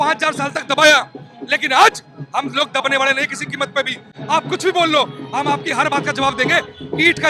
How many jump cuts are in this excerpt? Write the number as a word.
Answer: zero